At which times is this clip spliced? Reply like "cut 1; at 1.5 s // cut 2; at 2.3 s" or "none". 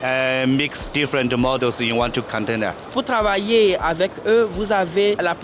cut 1; at 2.9 s